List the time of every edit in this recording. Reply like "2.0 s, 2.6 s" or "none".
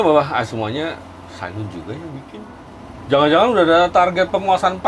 2.6 s

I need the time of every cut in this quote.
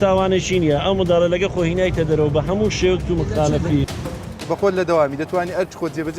3.9 s

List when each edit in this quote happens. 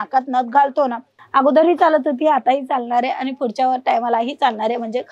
1.2 s

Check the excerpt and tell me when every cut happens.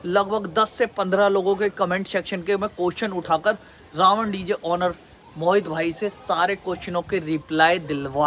none

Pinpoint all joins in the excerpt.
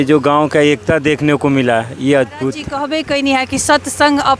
2.7 s

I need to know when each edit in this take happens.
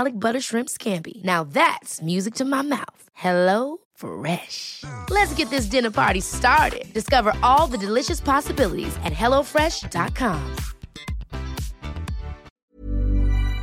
12.5 s

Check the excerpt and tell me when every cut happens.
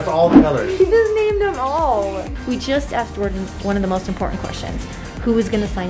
2.3 s

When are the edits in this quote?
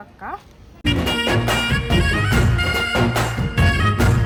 none

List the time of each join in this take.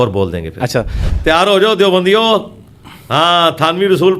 1.0 s

